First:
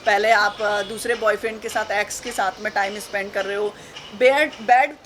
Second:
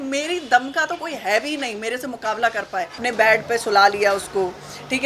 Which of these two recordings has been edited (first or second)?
second